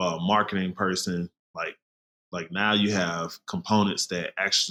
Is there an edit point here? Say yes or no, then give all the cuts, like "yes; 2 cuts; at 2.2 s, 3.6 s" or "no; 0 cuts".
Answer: no; 0 cuts